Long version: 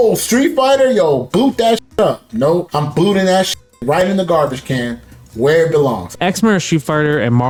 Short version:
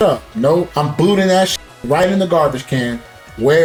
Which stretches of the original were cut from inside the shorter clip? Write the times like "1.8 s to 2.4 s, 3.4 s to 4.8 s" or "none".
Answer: none